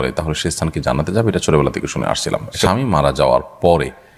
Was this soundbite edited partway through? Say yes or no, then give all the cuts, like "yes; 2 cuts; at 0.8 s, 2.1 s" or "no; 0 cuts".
yes; 1 cut; at 2.5 s